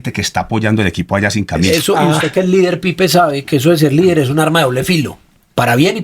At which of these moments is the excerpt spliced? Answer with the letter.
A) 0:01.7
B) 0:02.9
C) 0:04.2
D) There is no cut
A